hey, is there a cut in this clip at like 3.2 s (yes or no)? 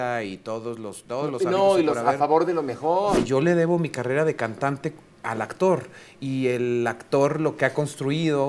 yes